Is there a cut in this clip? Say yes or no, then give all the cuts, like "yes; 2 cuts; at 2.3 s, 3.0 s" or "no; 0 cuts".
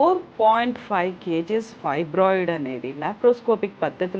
no; 0 cuts